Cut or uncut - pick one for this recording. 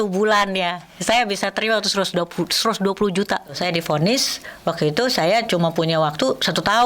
cut